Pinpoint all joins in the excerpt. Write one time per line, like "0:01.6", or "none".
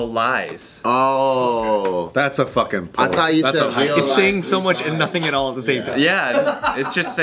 none